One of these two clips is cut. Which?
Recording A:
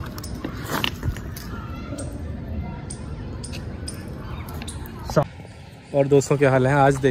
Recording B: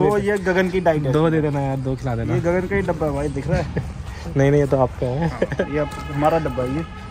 A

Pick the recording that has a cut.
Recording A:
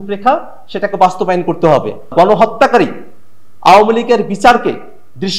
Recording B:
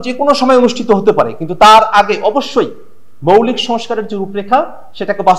A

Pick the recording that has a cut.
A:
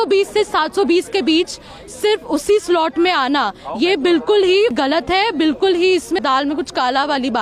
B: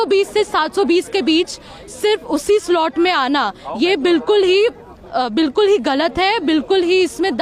A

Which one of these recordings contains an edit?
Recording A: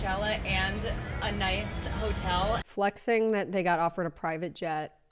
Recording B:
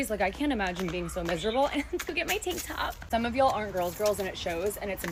A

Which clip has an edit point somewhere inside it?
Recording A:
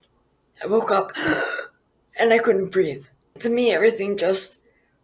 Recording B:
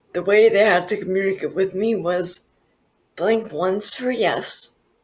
A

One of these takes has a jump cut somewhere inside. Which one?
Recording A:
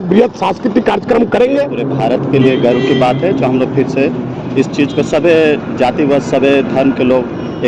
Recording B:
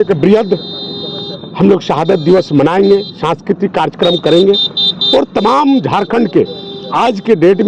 A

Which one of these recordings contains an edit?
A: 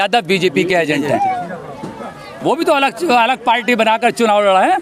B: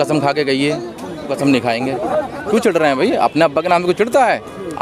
B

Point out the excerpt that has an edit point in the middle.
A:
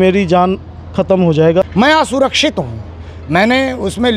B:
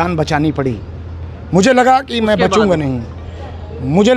A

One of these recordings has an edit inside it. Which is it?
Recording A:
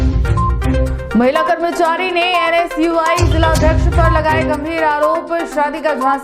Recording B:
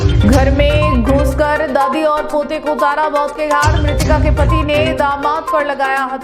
A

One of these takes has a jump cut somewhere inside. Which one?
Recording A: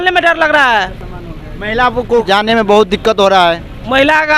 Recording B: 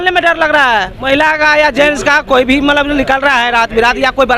B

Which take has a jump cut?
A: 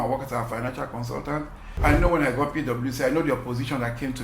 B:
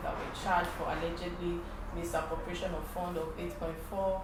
A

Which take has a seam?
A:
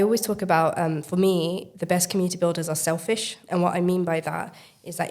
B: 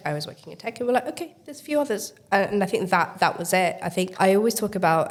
A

